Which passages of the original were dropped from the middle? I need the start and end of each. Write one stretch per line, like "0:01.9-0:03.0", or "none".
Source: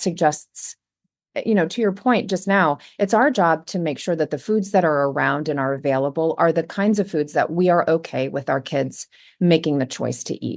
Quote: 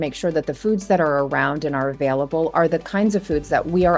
none